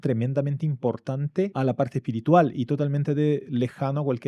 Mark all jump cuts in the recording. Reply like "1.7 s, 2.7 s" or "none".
1.5 s